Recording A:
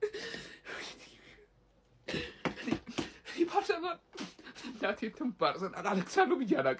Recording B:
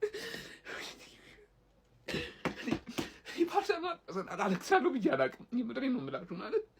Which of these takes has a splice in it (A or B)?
B